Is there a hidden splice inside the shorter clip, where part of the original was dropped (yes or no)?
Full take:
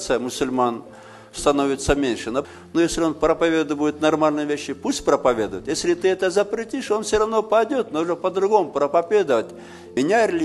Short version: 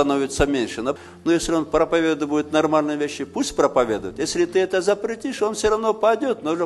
no